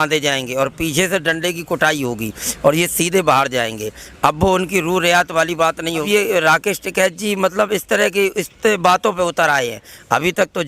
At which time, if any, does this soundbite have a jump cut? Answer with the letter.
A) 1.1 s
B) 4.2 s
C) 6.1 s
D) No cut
C